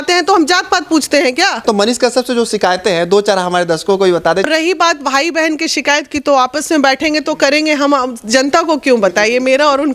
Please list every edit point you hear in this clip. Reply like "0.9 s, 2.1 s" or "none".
1.6 s, 4.5 s